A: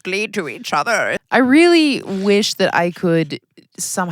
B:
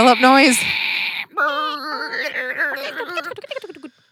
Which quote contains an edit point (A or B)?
A